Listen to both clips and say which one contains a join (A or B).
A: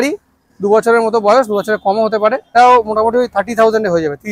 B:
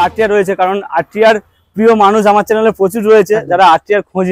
A